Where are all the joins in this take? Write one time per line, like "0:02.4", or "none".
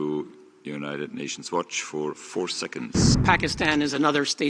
0:03.1